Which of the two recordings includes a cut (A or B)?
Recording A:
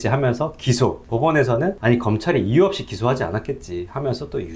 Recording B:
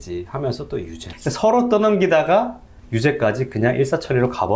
A